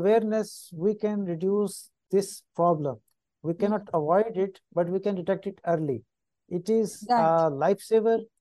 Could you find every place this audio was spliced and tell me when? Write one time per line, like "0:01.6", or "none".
0:02.0